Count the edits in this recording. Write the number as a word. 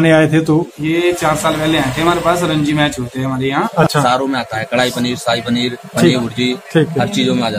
one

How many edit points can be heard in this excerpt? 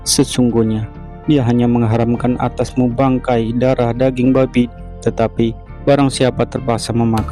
one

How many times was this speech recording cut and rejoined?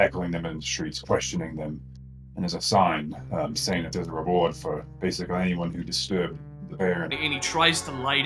one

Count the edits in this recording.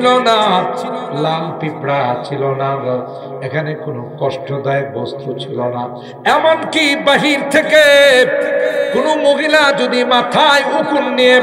zero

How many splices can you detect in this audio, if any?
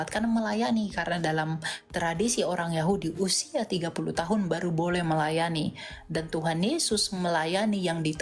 zero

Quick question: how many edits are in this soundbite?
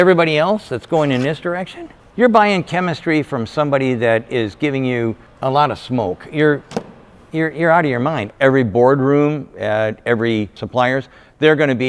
two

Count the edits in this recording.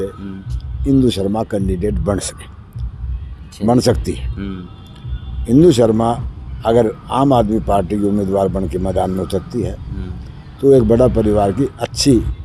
zero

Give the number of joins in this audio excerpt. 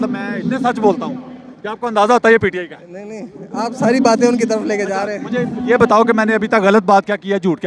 zero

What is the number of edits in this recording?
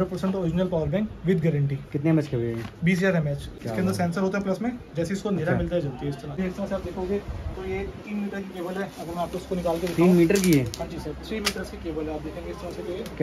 two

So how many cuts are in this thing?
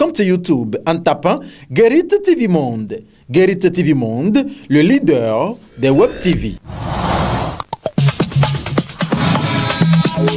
one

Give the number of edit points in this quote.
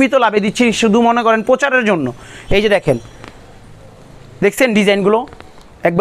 zero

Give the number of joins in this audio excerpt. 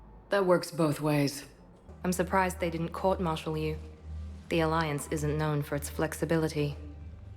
one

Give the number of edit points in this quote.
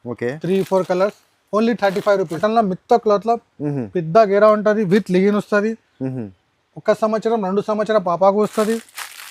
one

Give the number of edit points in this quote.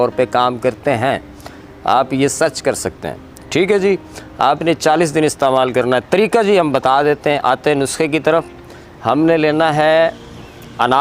zero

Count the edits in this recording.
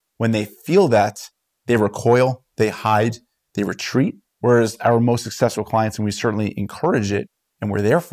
one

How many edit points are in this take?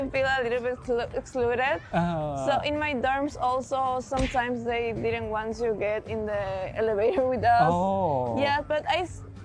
zero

